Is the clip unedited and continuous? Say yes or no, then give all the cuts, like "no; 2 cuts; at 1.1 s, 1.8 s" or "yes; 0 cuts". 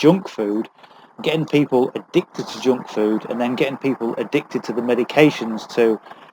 yes; 0 cuts